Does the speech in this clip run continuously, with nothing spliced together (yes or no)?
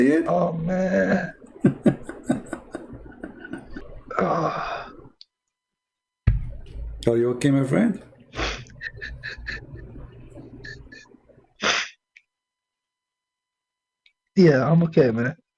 no